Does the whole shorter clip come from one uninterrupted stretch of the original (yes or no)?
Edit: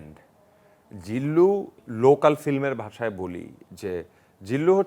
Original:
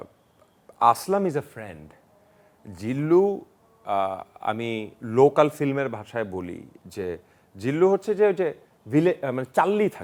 no